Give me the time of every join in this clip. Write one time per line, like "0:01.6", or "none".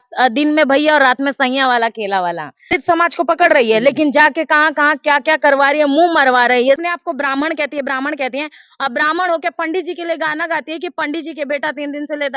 0:02.8
0:06.8

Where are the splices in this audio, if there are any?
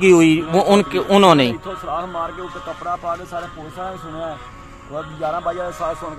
none

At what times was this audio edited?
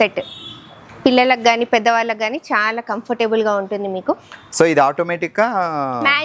none

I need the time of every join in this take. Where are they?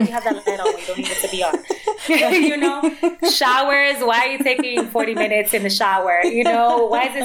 none

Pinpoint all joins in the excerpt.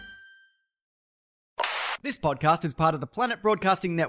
0:01.0
0:02.0

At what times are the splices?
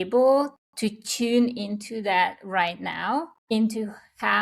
0:03.4

